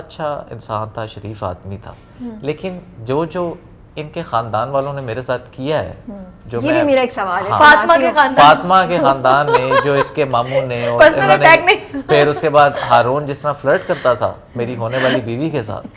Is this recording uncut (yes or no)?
yes